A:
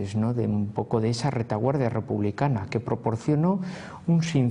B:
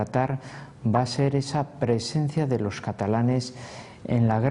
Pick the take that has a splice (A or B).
B